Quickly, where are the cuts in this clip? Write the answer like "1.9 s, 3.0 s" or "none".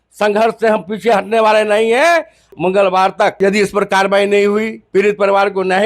2.5 s, 3.4 s